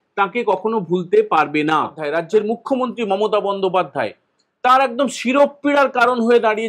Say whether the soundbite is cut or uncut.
cut